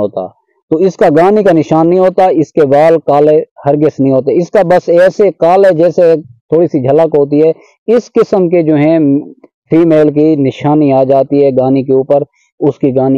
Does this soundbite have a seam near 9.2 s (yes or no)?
no